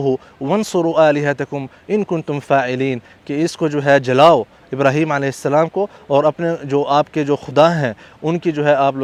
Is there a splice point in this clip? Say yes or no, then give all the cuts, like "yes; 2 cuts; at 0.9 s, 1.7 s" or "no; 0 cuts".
no; 0 cuts